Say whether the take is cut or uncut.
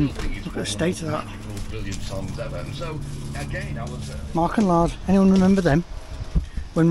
cut